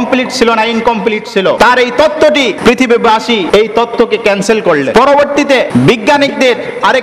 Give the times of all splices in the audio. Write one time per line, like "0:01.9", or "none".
0:01.6
0:02.6
0:03.5
0:04.9
0:05.7